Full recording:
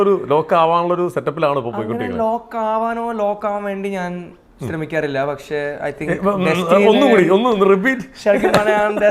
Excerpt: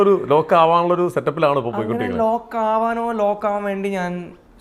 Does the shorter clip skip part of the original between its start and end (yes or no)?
no